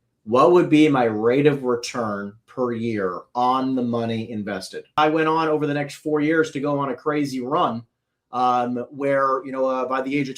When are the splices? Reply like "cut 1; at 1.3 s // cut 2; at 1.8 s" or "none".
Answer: cut 1; at 5.0 s